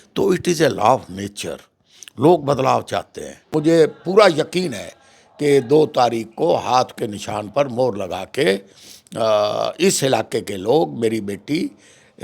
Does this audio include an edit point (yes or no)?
yes